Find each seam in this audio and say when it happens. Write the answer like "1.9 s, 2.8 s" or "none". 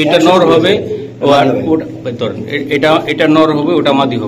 none